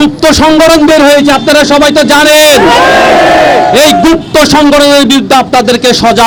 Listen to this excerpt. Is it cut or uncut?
uncut